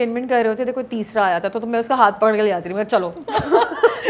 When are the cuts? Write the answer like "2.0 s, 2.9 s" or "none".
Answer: 3.2 s